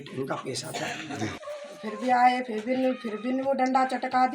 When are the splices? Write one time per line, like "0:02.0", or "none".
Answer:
0:01.4